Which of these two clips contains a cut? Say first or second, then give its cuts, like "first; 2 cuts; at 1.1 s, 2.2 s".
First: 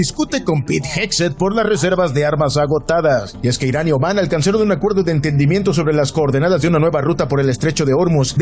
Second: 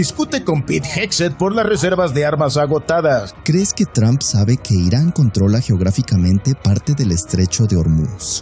second; 1 cut; at 3.3 s